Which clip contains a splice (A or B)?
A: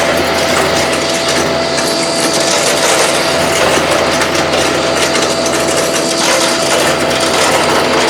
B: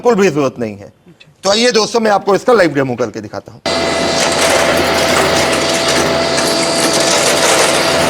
B